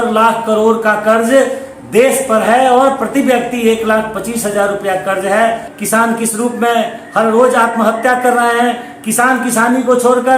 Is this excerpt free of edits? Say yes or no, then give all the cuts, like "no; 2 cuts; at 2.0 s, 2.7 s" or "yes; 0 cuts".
no; 1 cut; at 5.7 s